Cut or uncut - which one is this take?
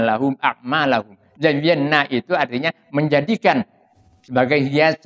uncut